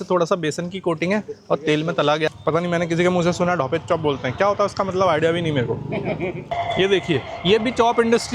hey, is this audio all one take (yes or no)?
no